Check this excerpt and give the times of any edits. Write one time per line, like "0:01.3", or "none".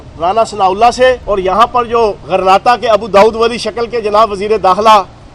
none